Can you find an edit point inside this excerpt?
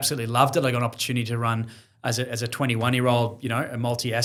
no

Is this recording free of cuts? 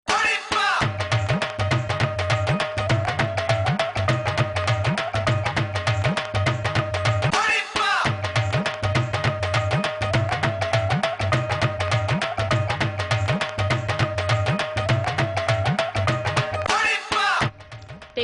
no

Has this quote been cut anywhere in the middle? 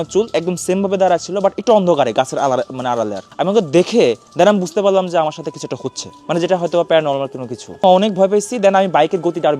no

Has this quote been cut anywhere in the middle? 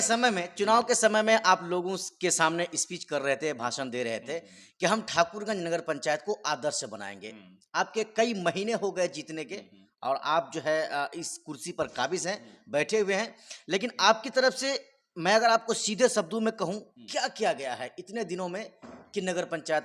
no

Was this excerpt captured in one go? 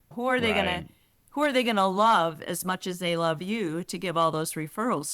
yes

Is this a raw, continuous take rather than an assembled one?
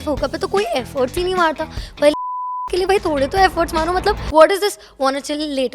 no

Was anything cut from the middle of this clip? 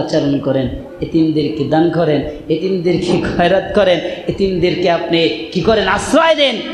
no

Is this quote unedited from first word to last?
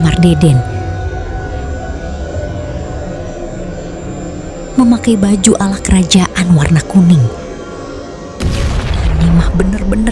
no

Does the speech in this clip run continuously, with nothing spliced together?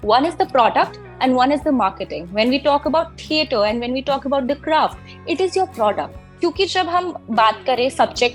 no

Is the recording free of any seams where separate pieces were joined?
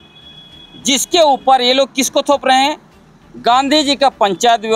yes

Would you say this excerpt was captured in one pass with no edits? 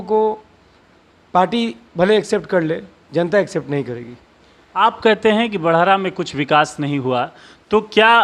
yes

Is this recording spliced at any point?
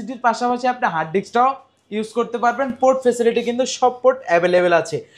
no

